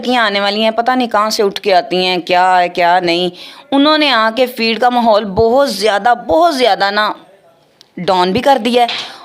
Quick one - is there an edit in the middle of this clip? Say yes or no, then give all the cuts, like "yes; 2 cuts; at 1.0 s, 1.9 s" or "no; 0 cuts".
no; 0 cuts